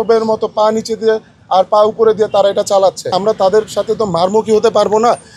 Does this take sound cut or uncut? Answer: cut